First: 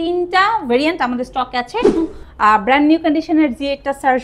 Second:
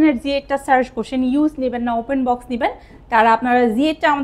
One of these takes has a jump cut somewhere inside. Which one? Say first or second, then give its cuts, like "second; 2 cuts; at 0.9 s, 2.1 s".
first; 1 cut; at 2.0 s